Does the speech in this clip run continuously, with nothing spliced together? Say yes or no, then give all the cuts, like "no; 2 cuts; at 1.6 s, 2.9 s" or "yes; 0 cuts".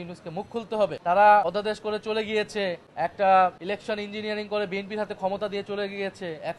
no; 4 cuts; at 1.0 s, 1.4 s, 2.9 s, 3.6 s